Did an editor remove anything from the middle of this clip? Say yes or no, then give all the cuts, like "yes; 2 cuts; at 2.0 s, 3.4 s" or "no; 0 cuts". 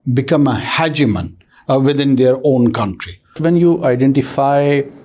yes; 1 cut; at 3.3 s